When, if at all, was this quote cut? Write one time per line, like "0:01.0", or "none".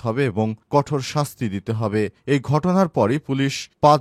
none